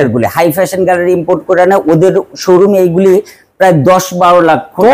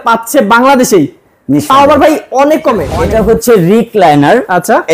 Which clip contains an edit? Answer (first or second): second